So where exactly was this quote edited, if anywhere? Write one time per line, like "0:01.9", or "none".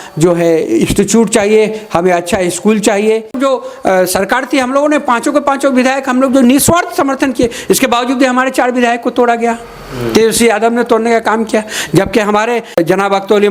0:03.4
0:12.8